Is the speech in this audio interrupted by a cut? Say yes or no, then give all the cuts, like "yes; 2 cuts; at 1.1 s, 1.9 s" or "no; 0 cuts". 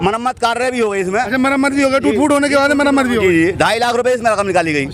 no; 0 cuts